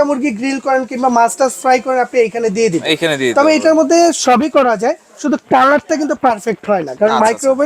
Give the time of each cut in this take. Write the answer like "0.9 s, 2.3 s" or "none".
none